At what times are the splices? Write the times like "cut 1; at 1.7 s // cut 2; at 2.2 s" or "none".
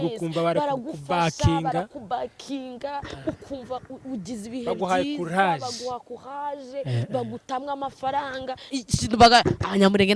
cut 1; at 8.7 s